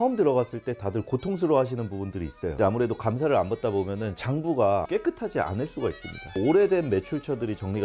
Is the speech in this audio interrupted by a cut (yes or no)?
yes